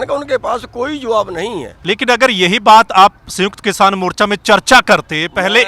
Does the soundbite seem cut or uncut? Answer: cut